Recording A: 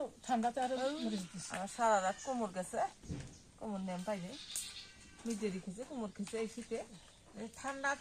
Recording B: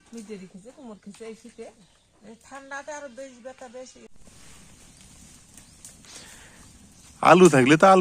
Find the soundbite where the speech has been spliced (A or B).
B